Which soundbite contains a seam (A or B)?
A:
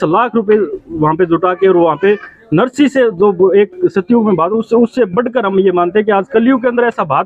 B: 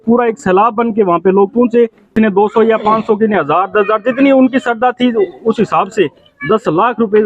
B